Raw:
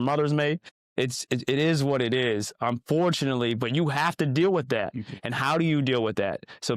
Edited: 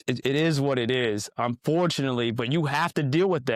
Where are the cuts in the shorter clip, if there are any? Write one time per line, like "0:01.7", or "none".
none